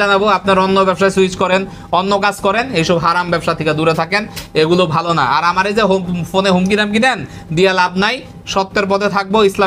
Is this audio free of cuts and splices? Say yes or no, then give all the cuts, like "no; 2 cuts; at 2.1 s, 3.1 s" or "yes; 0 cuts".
yes; 0 cuts